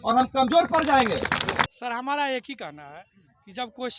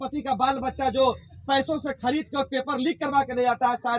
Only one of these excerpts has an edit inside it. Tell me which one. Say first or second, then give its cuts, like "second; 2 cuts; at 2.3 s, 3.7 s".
first; 1 cut; at 1.7 s